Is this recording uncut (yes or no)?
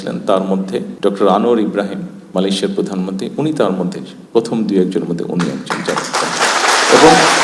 no